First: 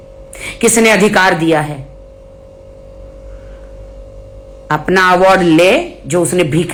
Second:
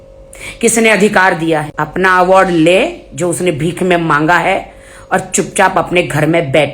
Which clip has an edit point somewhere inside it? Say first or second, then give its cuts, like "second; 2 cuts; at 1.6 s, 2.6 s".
second; 1 cut; at 1.7 s